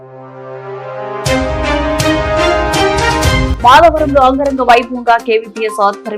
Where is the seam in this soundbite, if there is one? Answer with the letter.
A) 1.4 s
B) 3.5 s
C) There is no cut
B